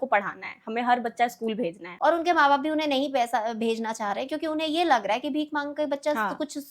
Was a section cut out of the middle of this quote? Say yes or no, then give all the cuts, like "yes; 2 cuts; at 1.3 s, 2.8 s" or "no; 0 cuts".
yes; 1 cut; at 1.8 s